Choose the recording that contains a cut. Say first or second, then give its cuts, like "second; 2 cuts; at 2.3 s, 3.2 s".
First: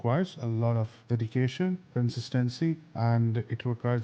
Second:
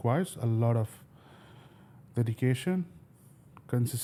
first; 3 cuts; at 0.9 s, 1.9 s, 2.9 s